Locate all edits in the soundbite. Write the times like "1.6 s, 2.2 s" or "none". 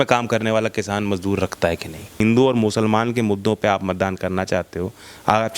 2.2 s